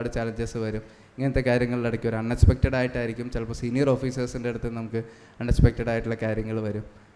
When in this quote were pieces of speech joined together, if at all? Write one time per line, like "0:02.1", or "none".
none